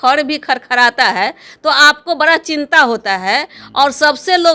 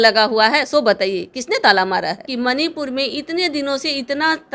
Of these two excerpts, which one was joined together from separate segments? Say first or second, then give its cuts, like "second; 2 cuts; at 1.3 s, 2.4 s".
second; 1 cut; at 2.3 s